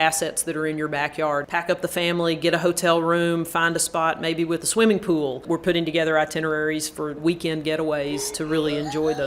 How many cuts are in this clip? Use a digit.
2